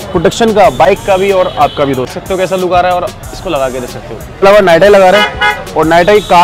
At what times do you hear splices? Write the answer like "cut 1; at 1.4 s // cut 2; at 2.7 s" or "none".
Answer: cut 1; at 2.2 s // cut 2; at 4.4 s